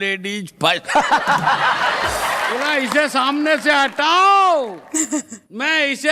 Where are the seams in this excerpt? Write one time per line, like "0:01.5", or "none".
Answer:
0:02.6

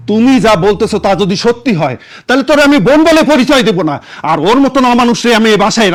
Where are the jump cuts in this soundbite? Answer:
none

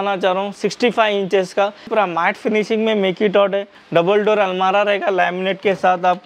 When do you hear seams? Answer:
0:01.9
0:03.8

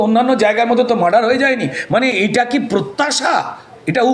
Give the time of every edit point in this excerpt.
none

